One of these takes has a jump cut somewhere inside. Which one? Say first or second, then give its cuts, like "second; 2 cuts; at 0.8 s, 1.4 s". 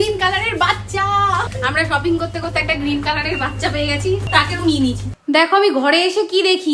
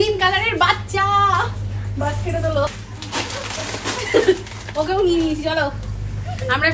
first; 2 cuts; at 1.5 s, 5.1 s